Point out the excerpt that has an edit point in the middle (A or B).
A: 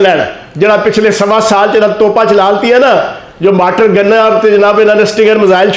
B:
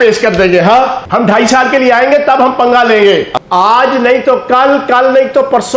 B